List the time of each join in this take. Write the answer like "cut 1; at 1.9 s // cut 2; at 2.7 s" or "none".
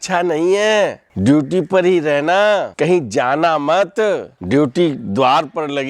cut 1; at 1.0 s // cut 2; at 2.7 s // cut 3; at 4.3 s